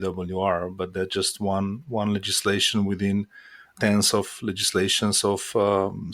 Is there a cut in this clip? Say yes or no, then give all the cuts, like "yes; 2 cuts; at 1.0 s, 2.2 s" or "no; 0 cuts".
no; 0 cuts